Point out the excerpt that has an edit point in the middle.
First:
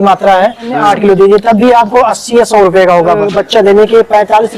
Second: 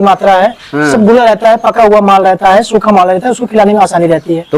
first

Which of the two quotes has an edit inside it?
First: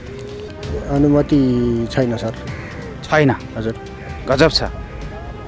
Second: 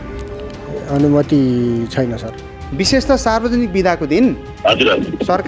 second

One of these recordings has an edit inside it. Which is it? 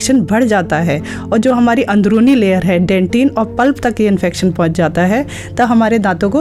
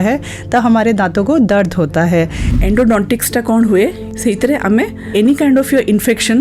second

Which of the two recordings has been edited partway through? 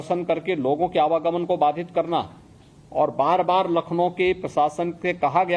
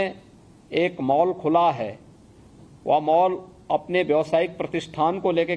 first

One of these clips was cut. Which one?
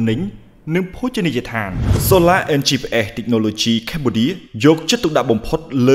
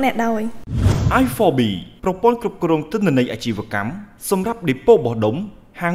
first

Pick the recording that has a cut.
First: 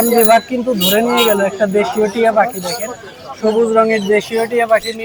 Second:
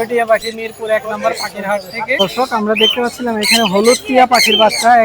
second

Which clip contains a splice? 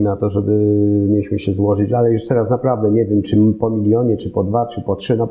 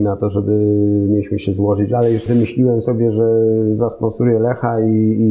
second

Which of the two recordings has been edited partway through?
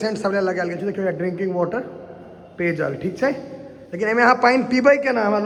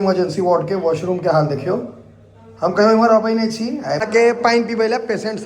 second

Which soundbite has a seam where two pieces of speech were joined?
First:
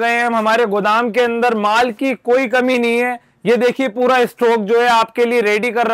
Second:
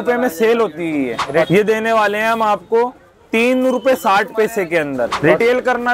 second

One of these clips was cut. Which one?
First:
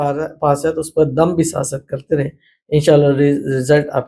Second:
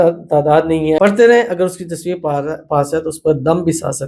second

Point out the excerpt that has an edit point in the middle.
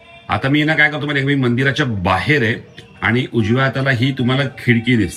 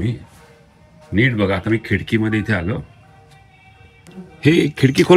second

